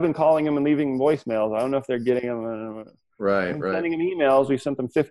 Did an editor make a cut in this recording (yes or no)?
no